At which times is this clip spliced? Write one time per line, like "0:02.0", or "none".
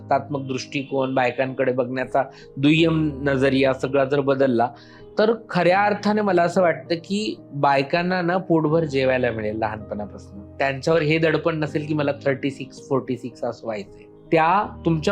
none